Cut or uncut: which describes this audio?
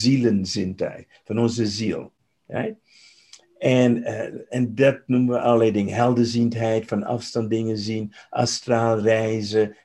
uncut